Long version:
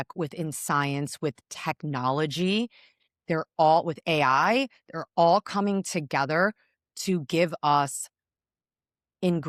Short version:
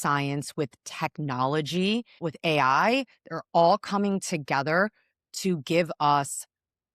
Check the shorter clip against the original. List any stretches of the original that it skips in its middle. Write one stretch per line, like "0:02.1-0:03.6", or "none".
0:03.0-0:03.9

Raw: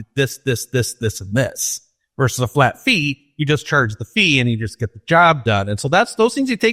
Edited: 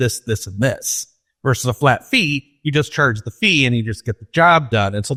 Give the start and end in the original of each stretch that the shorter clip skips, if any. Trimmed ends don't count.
none

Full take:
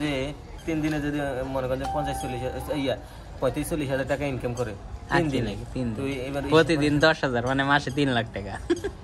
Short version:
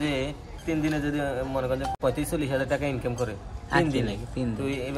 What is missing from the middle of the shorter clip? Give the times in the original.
0:01.9-0:03.3

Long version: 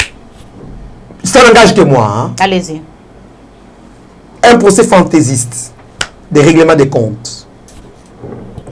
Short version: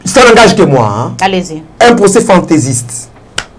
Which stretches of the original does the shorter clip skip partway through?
0:02.8-0:04.2

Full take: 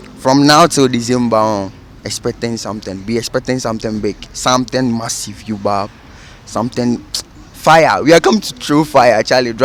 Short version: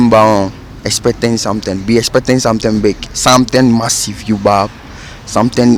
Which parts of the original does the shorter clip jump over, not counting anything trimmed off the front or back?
none

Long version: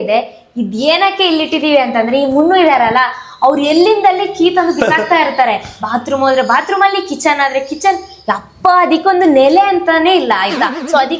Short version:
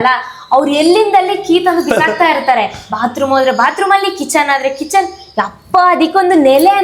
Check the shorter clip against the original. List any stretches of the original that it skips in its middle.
none

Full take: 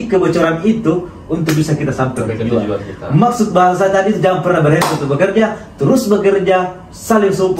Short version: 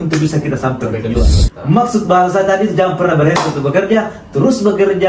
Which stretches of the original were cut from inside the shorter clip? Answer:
0:02.8-0:02.9

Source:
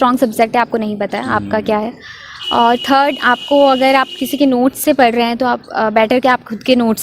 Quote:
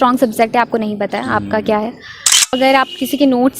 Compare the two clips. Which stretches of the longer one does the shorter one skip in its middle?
0:02.5-0:03.7

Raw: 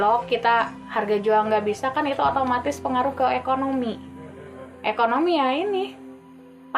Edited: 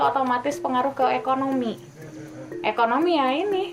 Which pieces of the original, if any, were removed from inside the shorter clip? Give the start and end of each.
none

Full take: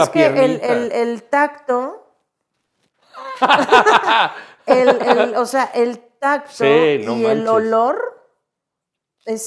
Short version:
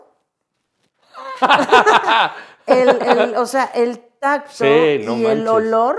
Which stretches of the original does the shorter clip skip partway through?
none

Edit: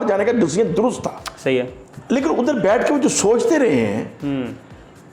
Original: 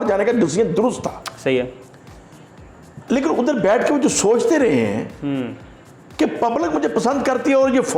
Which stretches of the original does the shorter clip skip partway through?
0:01.9-0:02.9

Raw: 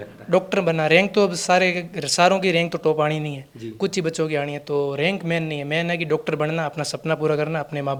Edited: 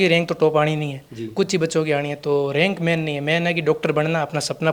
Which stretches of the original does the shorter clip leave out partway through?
none

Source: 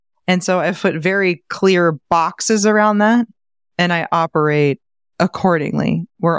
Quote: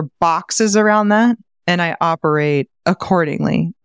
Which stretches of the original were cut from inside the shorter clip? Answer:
0:03.4-0:03.6
0:04.8-0:05.1

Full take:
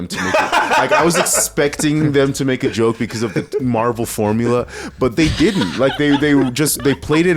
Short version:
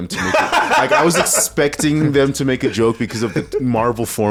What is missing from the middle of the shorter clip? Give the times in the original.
none

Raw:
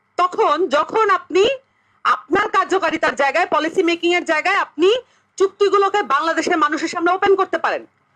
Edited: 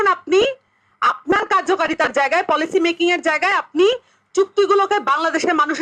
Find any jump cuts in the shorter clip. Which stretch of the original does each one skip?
none

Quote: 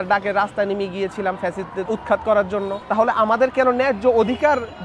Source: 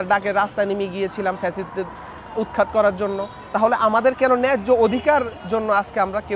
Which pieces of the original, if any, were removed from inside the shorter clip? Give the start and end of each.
0:01.8-0:02.3
0:03.3-0:03.4

